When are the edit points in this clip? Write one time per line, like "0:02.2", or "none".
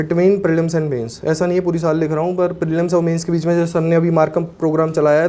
none